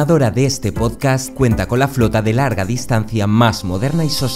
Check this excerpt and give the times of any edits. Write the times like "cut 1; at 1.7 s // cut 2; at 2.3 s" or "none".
none